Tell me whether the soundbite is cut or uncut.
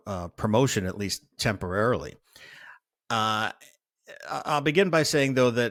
uncut